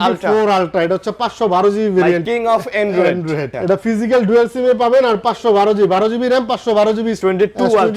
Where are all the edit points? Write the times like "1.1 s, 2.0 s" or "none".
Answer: 2.2 s, 3.5 s, 7.2 s

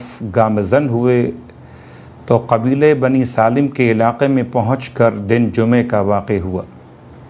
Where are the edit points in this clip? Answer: 4.3 s

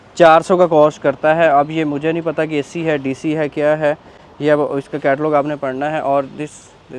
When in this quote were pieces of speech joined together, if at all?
none

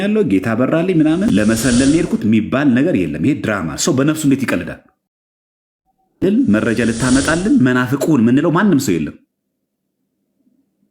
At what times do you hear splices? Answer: 1.3 s, 6.2 s

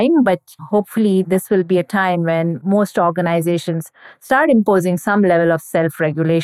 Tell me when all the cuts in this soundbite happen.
none

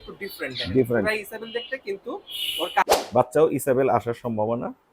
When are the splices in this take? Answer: 2.8 s

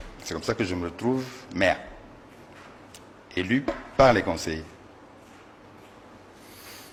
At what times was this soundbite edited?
none

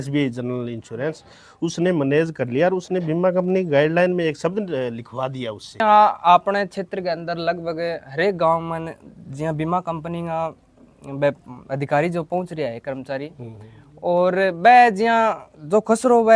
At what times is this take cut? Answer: 5.8 s

